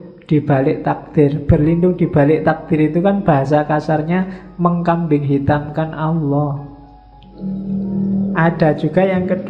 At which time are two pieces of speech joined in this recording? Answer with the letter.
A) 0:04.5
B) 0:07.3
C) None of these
B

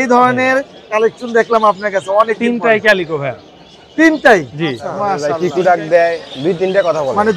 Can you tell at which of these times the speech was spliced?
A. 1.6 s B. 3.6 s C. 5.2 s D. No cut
C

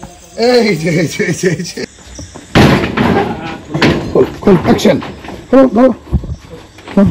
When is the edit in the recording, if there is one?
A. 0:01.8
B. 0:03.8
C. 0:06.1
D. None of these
A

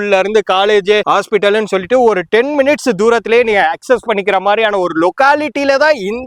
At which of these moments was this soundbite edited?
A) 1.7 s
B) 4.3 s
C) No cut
C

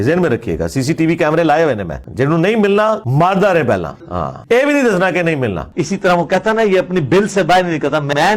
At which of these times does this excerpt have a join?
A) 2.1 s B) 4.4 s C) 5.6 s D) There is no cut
C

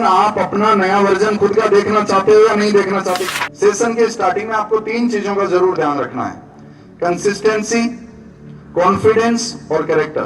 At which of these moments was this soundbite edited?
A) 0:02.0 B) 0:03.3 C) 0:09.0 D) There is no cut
B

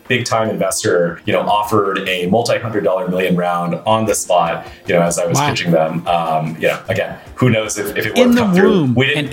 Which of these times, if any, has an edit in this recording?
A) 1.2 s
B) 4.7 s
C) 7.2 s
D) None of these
A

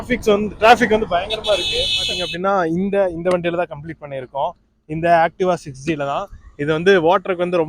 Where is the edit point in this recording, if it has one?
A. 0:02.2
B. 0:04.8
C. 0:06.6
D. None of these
A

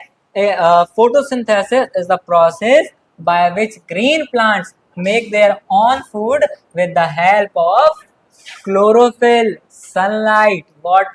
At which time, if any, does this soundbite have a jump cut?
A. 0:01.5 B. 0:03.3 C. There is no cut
C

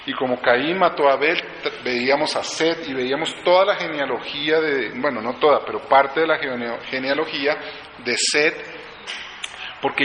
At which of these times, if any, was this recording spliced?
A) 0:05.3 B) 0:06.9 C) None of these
B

